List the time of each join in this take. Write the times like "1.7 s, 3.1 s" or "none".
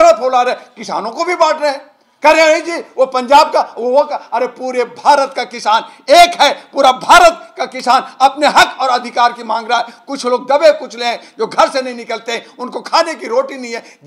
none